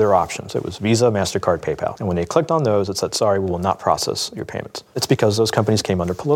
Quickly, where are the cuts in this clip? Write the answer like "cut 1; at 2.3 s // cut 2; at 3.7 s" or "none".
cut 1; at 2.0 s // cut 2; at 5.0 s